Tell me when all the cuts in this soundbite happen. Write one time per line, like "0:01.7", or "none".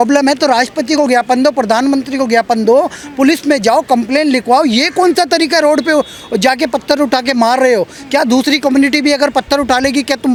none

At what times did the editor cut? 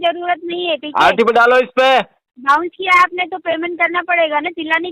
none

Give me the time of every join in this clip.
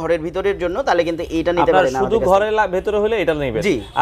none

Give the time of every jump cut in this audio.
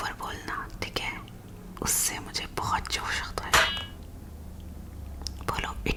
none

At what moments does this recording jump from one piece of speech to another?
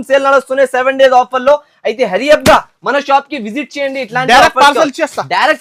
none

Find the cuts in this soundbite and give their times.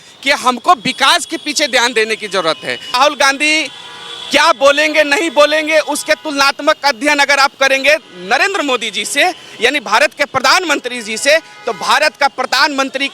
0:03.0

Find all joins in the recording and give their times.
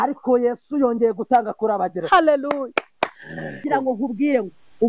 0:03.6

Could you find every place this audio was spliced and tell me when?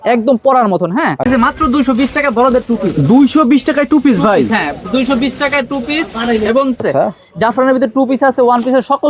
0:01.3
0:06.8

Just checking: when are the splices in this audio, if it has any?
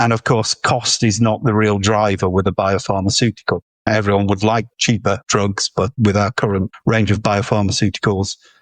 0:03.8
0:05.2
0:06.7

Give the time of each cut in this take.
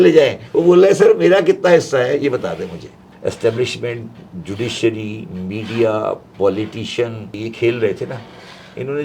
0:03.0
0:07.4

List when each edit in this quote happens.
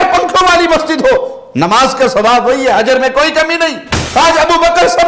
0:04.0

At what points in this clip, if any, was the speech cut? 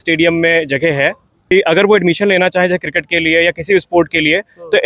0:01.3

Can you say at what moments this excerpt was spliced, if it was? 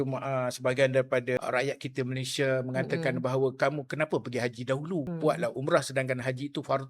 0:01.4
0:05.1

